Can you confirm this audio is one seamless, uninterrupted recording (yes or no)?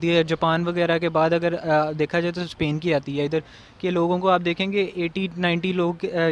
yes